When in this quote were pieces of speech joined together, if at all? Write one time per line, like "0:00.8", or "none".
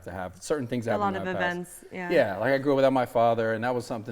none